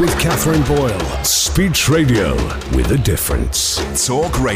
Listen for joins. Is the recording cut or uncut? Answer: uncut